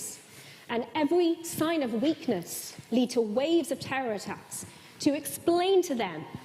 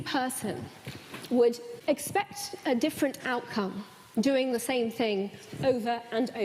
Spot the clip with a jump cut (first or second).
second